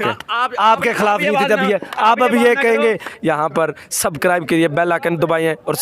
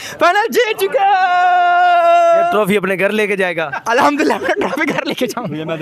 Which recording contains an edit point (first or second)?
first